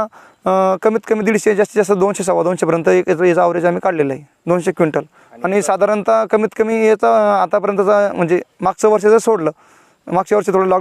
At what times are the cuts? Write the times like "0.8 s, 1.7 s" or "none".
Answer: 4.3 s